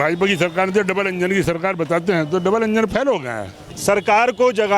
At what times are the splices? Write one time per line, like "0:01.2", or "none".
0:03.7